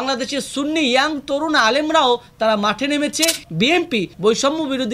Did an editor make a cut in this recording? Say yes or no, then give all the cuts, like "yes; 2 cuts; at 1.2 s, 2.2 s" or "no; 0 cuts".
yes; 1 cut; at 3.4 s